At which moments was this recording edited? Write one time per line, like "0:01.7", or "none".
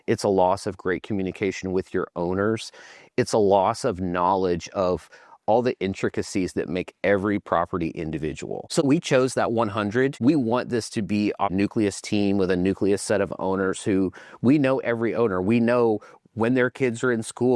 0:08.8
0:10.2
0:11.5